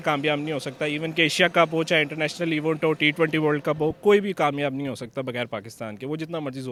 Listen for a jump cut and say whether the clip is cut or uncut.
uncut